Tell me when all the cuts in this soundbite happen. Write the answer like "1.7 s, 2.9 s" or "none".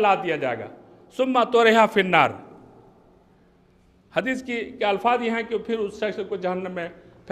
none

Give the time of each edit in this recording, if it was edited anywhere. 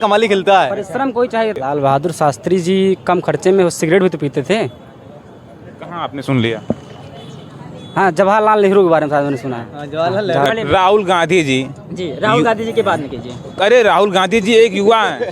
1.6 s, 10.5 s

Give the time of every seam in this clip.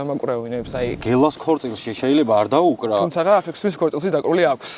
1.0 s

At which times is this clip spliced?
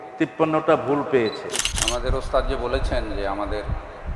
1.7 s

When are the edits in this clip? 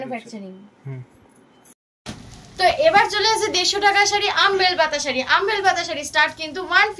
1.8 s

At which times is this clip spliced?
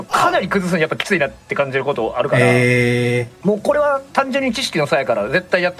3.3 s

